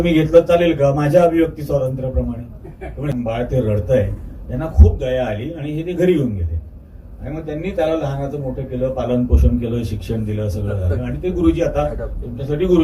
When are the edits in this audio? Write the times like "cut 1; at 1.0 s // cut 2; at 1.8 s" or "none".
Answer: cut 1; at 3.1 s